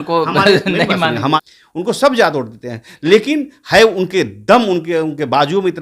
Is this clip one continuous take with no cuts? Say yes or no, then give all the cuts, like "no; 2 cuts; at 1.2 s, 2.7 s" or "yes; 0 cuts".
no; 1 cut; at 1.4 s